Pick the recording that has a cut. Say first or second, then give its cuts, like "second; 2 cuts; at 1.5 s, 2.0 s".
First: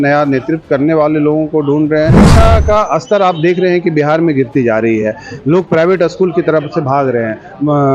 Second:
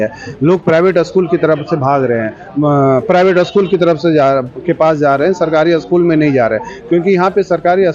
first; 1 cut; at 2.3 s